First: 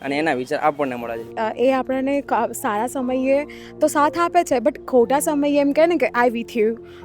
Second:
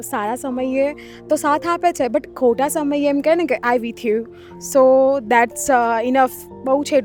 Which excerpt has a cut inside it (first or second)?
first